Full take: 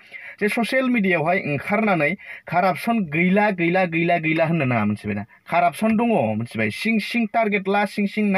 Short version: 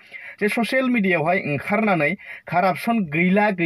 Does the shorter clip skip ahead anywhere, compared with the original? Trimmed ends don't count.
no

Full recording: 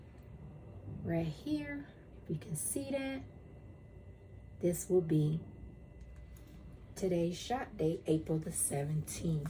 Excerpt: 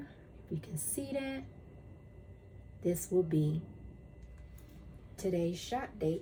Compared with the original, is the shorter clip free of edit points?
yes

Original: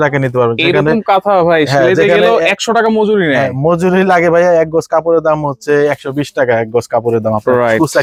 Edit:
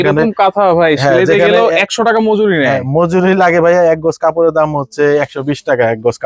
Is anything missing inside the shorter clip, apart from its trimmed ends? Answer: no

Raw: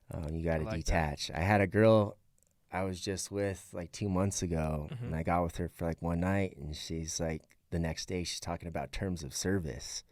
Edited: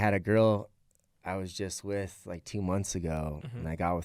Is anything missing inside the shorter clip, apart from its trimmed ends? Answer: no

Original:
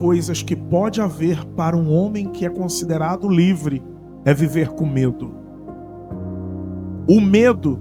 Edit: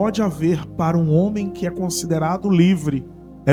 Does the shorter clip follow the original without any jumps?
yes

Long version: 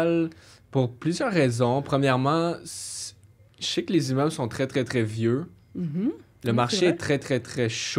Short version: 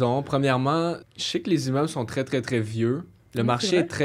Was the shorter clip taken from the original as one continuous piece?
no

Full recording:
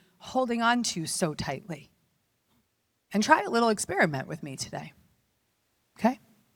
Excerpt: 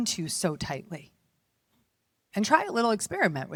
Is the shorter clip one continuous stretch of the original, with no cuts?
yes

